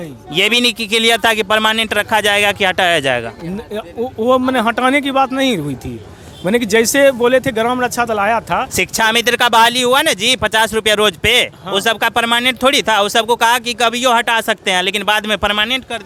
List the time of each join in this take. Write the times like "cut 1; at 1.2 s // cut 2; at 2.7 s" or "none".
none